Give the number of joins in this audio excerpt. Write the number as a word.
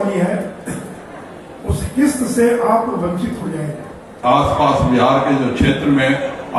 one